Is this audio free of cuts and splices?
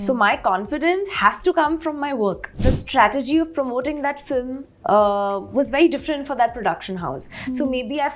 no; 1 cut; at 2.5 s

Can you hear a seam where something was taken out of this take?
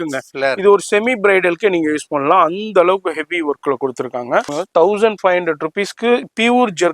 yes; 1 cut; at 4.5 s

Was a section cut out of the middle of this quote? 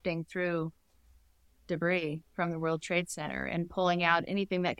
no; 0 cuts

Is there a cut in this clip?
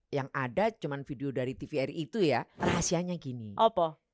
yes; 1 cut; at 2.5 s

